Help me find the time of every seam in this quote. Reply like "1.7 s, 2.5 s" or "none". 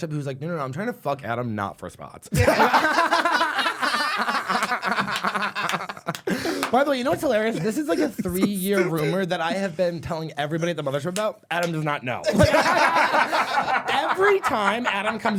none